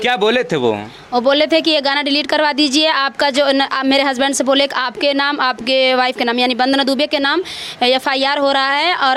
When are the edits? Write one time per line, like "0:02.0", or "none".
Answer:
none